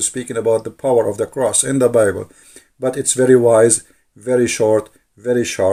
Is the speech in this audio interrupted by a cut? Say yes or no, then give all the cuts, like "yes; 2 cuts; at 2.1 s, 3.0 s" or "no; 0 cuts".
no; 0 cuts